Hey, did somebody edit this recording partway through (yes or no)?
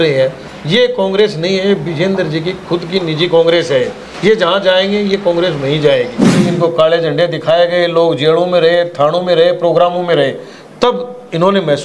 yes